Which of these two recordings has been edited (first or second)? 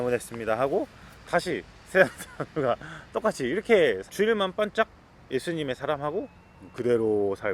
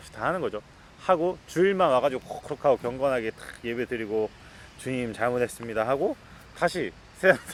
first